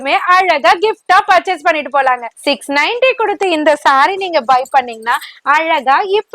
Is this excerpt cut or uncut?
cut